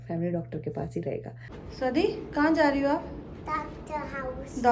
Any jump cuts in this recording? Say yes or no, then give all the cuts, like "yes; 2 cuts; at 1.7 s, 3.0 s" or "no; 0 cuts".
yes; 1 cut; at 1.6 s